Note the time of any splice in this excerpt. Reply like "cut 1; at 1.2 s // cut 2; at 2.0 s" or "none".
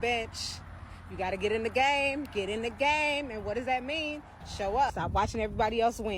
cut 1; at 4.9 s